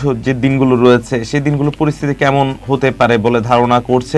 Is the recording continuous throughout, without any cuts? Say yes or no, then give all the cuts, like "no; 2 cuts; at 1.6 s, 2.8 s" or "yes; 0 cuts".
yes; 0 cuts